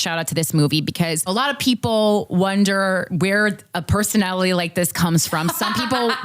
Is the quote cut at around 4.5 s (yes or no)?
no